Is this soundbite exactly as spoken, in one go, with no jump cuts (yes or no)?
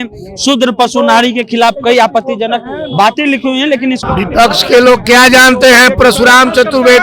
no